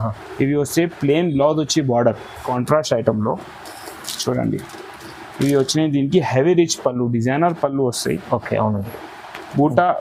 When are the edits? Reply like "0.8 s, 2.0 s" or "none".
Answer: 2.5 s

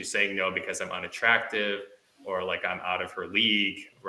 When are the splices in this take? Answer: none

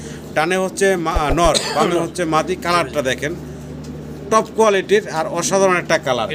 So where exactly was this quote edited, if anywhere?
none

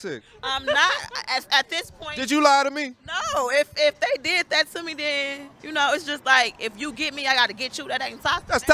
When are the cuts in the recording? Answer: none

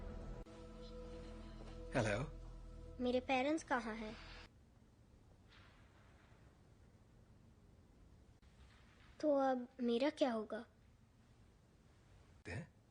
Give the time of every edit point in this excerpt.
4.5 s

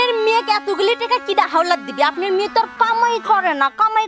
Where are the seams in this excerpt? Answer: none

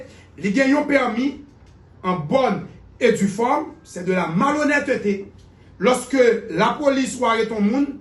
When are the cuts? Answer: none

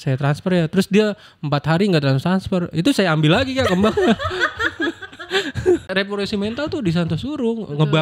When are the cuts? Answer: 5.9 s

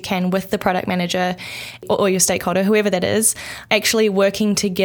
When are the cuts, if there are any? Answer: 1.8 s, 3.5 s

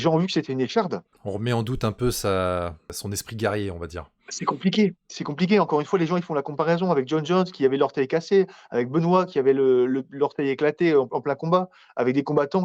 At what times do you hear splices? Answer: 1.1 s, 3.0 s

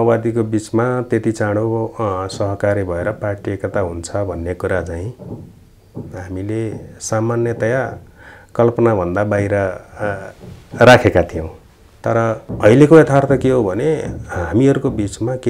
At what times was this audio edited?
12.5 s

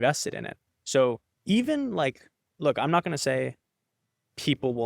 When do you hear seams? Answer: 1.3 s

